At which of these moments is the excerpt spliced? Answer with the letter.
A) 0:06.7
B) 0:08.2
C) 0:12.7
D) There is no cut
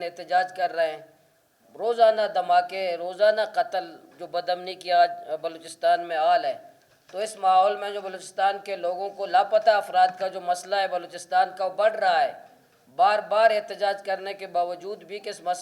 D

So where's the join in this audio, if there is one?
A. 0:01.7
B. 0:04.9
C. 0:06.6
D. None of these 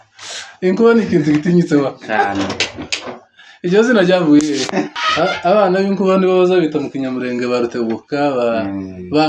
B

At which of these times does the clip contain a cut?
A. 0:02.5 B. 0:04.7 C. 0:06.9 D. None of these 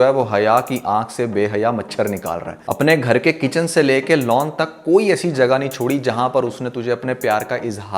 A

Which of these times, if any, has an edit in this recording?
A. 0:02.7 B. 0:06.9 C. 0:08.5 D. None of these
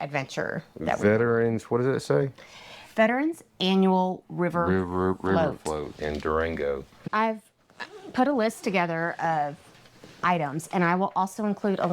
B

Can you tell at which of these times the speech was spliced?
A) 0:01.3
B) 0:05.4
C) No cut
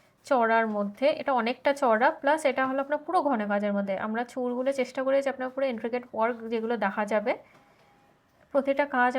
C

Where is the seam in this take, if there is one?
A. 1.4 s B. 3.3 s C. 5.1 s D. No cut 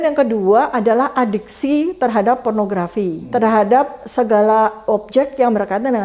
B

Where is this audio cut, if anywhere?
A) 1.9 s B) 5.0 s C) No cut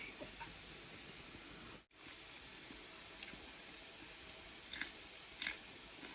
A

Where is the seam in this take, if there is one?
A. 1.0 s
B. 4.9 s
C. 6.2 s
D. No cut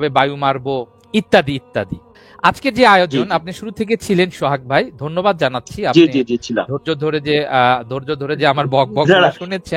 A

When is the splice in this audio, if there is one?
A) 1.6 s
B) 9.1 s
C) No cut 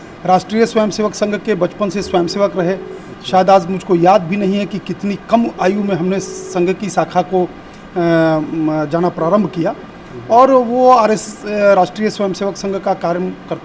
C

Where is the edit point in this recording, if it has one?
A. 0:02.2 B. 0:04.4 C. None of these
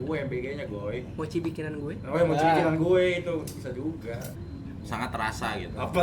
B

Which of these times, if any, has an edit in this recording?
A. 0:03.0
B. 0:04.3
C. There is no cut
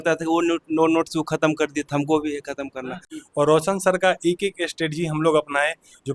A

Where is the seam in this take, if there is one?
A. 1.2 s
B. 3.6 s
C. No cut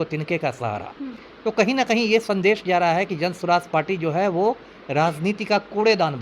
A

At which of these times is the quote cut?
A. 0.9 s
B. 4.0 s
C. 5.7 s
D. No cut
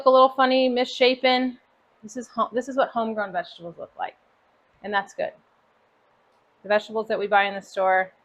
D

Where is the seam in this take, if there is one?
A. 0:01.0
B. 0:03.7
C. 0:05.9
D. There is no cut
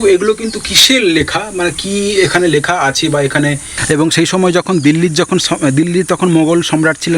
B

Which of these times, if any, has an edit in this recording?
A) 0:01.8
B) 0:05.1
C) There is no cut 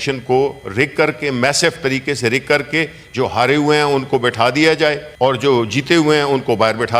B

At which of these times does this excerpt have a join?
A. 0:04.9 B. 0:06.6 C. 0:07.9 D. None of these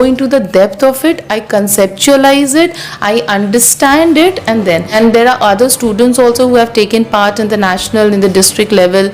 A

